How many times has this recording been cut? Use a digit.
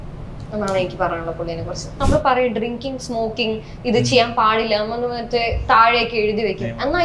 1